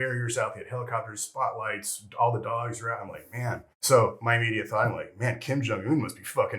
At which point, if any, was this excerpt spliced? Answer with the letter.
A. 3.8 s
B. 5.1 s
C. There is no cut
A